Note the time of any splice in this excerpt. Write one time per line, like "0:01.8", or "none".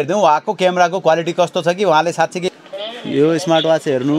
0:02.5